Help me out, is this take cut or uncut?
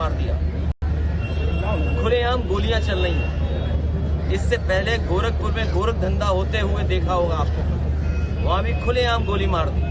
uncut